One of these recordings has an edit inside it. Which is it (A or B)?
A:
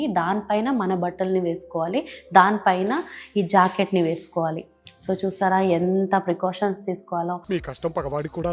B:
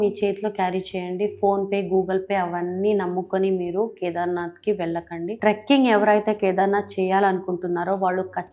B